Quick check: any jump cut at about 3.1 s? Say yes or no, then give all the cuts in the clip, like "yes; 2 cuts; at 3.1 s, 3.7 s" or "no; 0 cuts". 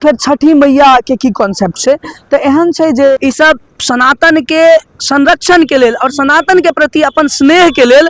yes; 1 cut; at 3.1 s